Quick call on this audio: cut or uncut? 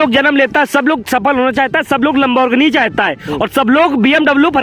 uncut